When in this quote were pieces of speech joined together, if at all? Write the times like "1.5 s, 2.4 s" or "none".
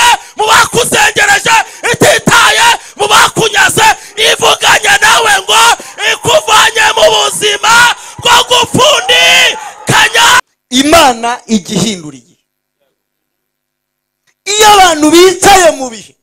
10.6 s